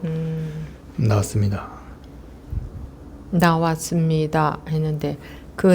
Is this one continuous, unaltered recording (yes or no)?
no